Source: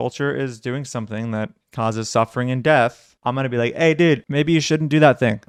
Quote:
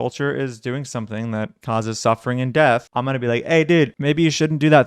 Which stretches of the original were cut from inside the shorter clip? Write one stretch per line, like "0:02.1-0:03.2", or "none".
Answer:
0:01.6-0:01.7
0:03.0-0:03.2